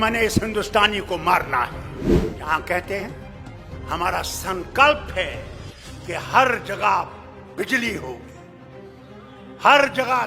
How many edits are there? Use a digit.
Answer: 1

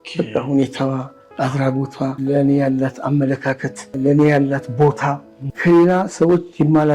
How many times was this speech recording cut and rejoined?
3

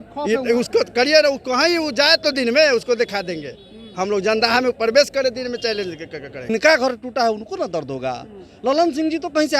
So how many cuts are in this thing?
1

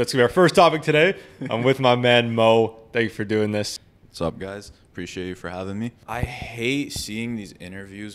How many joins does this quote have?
2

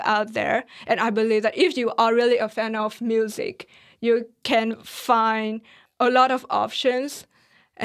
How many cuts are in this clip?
0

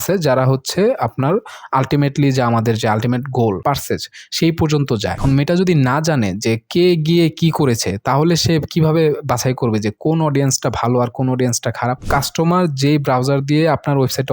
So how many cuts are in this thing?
3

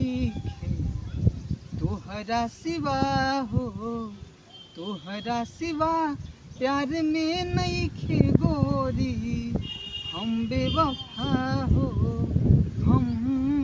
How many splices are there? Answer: 0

